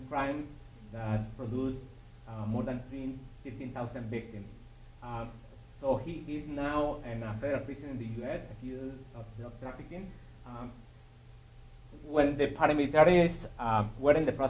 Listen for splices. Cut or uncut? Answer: cut